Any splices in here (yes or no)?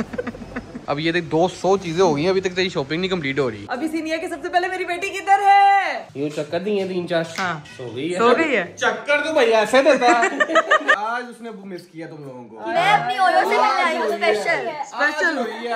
yes